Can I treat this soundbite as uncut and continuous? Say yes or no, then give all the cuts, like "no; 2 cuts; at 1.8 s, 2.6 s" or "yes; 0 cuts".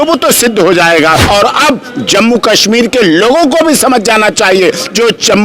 no; 1 cut; at 1.2 s